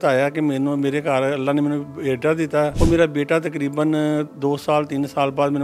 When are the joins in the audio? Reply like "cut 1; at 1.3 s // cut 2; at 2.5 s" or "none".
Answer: cut 1; at 2.7 s